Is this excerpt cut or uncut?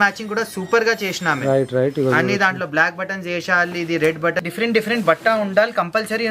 cut